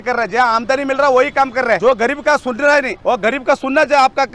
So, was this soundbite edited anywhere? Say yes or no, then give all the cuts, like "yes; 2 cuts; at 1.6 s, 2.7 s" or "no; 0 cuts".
yes; 2 cuts; at 1.8 s, 2.9 s